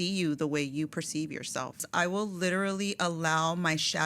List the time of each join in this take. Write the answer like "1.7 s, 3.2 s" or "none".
1.8 s